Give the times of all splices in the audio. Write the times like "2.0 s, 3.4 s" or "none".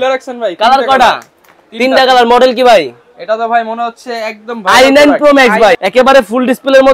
5.8 s